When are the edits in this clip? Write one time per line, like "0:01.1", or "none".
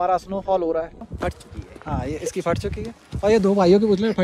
0:01.0